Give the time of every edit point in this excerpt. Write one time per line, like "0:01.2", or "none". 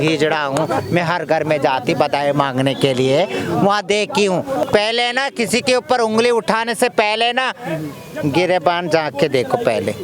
0:04.6